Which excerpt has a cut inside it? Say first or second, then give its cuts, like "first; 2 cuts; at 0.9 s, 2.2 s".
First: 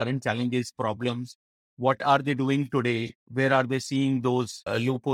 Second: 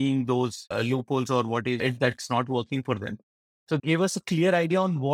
second; 1 cut; at 3.8 s